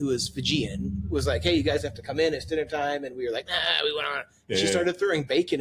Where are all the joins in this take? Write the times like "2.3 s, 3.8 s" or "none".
none